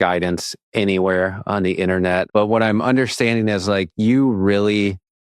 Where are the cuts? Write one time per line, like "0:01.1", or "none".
0:02.3